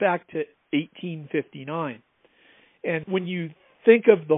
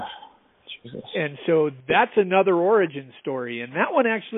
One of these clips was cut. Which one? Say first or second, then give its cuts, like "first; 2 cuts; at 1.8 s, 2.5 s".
first; 1 cut; at 3.0 s